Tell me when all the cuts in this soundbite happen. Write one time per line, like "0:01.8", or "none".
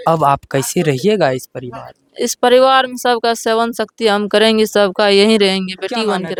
none